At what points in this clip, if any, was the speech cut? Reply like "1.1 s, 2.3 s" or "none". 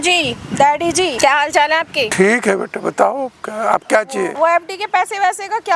1.1 s, 2.1 s, 4.3 s